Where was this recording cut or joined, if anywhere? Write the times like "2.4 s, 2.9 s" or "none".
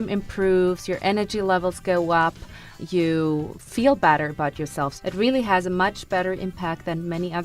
2.7 s, 3.6 s, 5.0 s